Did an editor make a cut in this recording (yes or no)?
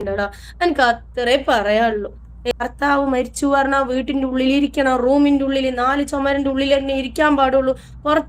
yes